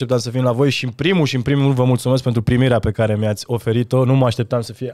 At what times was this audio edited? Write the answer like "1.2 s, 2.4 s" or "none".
none